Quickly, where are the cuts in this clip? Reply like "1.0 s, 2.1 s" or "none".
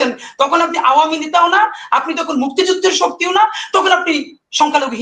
none